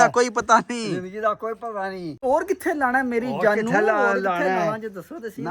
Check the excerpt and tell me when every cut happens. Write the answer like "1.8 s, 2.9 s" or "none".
2.1 s